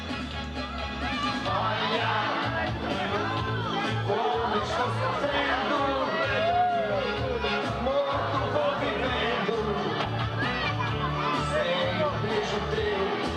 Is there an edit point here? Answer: yes; 1 cut; at 11.7 s

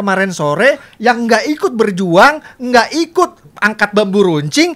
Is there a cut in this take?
no; 0 cuts

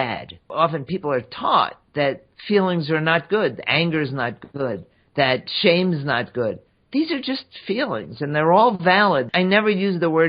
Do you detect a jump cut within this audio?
yes; 1 cut; at 9.3 s

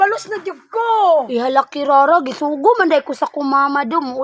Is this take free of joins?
no; 1 cut; at 1.3 s

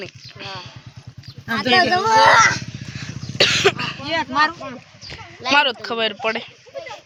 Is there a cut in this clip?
no; 0 cuts

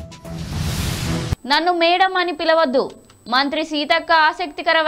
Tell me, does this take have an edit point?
yes; 1 cut; at 1.2 s

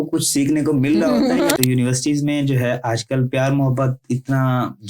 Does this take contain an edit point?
yes; 1 cut; at 1.6 s

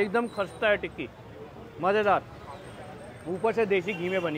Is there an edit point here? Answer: no; 0 cuts

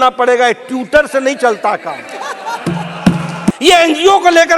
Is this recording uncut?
no; 1 cut; at 3.6 s

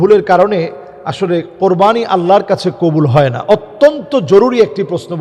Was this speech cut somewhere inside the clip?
no; 0 cuts

